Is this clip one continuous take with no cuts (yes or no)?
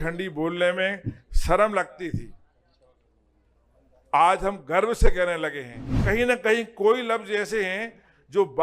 no